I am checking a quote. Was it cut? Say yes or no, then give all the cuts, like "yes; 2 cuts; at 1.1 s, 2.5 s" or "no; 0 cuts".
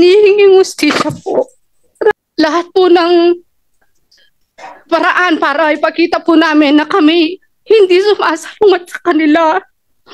yes; 1 cut; at 2.1 s